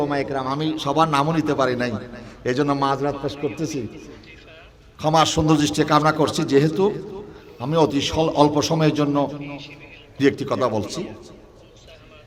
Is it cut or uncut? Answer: uncut